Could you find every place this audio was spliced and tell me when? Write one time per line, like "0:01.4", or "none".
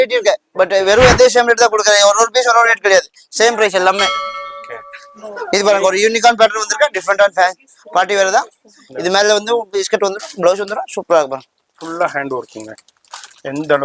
none

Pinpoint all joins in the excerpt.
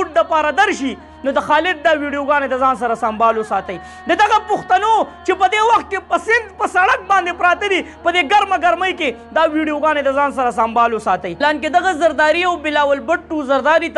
0:11.4

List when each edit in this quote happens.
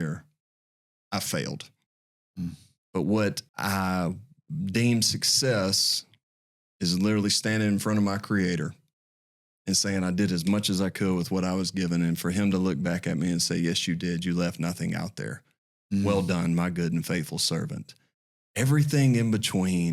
0:02.7
0:03.5

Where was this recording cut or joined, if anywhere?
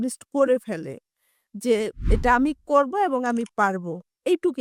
none

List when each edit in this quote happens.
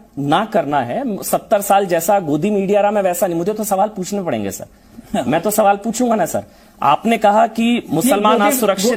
none

